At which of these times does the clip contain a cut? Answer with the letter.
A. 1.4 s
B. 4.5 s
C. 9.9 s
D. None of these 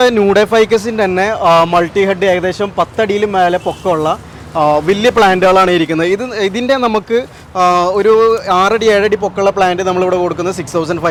D